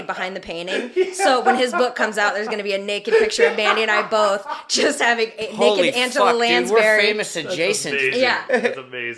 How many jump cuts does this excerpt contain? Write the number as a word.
zero